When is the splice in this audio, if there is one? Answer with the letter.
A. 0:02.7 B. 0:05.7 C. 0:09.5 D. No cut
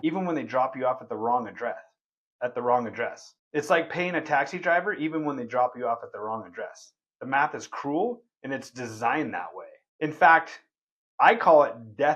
D